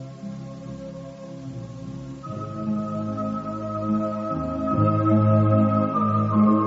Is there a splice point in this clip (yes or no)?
yes